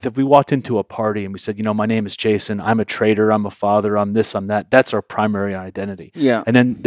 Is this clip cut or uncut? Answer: uncut